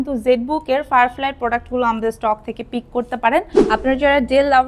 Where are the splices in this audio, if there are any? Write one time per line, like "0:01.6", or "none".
0:03.6